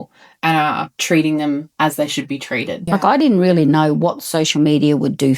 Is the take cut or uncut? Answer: cut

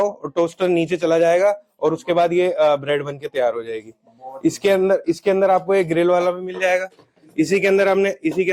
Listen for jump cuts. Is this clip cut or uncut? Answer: uncut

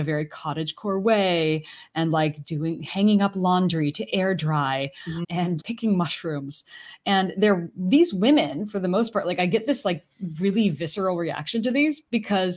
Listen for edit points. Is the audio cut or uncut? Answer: cut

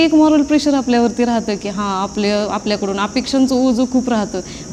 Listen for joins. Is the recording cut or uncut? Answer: uncut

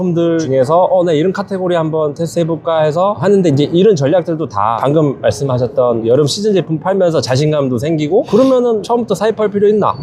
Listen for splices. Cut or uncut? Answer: uncut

